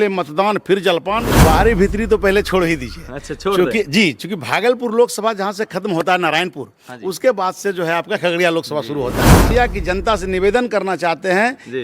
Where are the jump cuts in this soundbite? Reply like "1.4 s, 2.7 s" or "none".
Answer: 1.3 s, 9.5 s